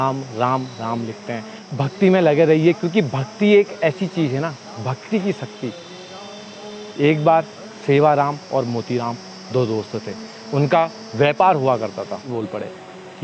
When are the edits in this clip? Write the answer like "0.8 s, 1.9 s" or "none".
1.6 s, 12.3 s